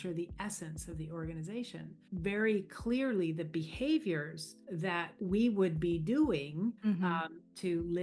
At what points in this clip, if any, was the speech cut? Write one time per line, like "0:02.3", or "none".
0:02.0
0:04.9
0:06.8